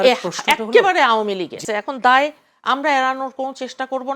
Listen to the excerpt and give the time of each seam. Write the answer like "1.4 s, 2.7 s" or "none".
1.6 s